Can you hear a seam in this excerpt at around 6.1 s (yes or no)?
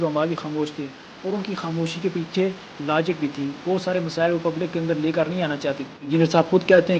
yes